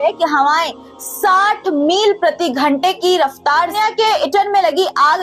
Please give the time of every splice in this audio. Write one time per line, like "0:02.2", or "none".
0:03.7